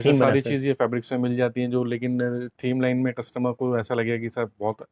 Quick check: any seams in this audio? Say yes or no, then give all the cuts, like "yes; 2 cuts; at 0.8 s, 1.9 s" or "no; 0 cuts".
no; 0 cuts